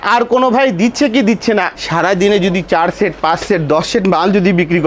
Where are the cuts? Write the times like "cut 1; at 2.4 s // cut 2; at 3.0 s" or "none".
cut 1; at 1.8 s